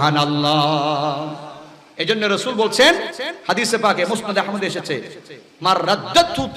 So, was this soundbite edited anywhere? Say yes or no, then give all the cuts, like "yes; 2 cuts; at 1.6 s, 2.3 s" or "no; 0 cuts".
no; 0 cuts